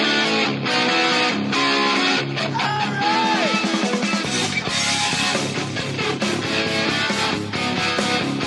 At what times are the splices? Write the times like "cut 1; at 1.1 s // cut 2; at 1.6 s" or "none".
cut 1; at 6.1 s